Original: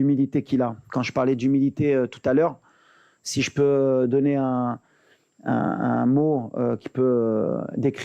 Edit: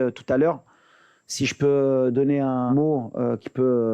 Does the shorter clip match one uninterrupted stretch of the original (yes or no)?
no